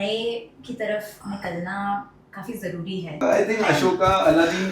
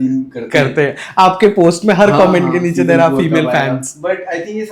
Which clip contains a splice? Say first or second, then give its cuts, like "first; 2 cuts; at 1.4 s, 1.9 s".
first; 1 cut; at 3.2 s